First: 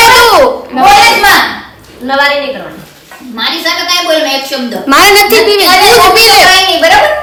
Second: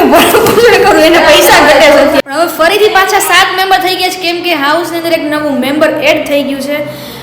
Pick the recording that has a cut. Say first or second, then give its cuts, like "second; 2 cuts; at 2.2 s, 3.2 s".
second; 1 cut; at 2.2 s